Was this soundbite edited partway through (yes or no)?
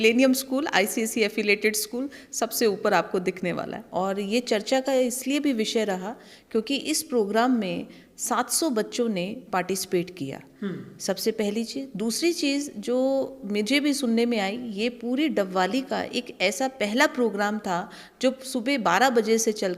yes